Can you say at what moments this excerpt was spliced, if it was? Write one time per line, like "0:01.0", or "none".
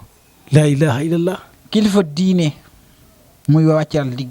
0:03.3

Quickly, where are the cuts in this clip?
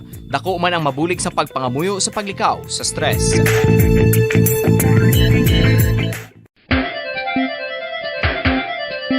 0:06.3

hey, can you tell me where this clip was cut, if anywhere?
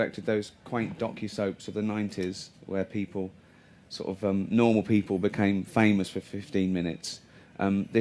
0:05.3

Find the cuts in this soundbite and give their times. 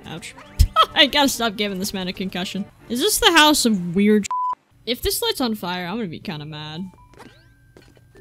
none

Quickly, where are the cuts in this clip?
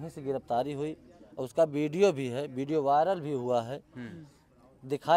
none

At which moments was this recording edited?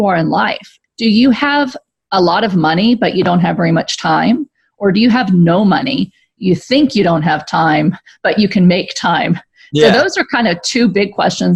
none

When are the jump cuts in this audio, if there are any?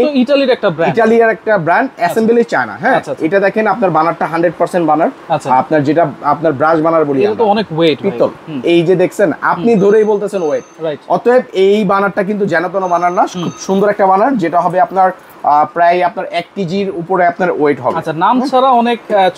none

